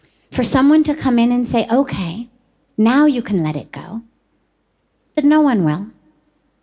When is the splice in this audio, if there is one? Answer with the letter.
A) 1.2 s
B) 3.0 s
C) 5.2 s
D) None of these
C